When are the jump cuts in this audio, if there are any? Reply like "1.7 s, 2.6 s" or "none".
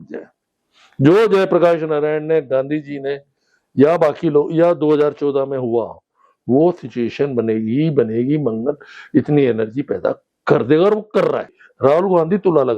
11.6 s